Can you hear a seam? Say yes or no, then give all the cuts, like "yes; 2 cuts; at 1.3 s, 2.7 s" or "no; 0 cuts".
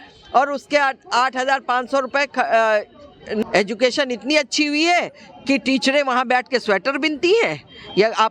yes; 1 cut; at 3.4 s